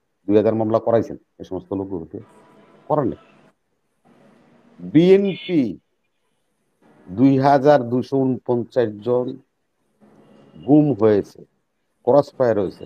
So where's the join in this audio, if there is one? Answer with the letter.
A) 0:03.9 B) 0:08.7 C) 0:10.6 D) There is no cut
D